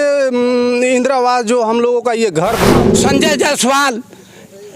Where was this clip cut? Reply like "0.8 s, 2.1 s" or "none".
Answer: 2.8 s